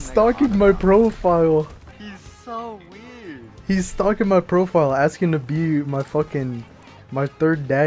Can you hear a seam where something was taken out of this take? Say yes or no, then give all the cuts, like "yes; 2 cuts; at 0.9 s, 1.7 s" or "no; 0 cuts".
yes; 1 cut; at 1.8 s